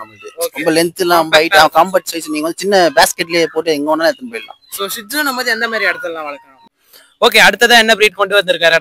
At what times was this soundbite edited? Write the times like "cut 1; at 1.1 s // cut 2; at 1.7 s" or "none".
cut 1; at 6.5 s